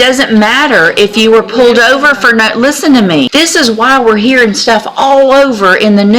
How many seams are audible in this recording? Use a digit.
1